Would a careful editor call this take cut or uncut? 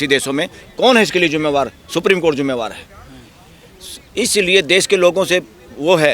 uncut